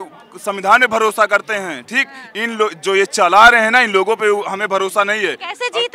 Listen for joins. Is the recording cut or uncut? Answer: uncut